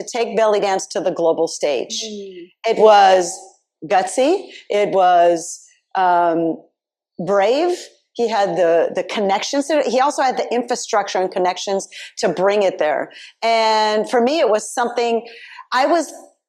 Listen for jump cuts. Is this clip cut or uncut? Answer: uncut